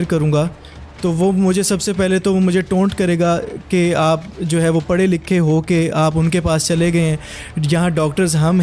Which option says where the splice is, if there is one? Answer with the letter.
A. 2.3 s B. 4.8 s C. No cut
C